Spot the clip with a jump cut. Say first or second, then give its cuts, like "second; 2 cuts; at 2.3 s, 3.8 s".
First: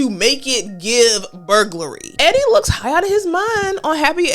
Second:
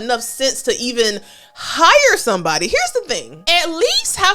first; 1 cut; at 2.1 s